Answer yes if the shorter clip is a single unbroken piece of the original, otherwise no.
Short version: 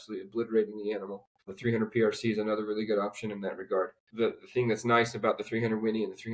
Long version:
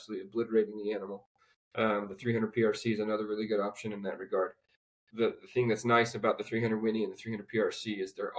no